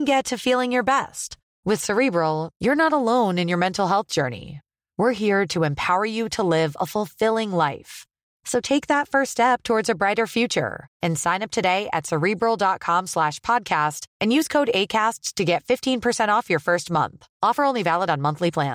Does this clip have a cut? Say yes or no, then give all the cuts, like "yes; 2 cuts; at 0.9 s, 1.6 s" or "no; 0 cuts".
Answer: no; 0 cuts